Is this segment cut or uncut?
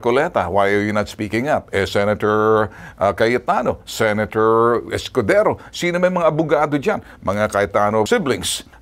uncut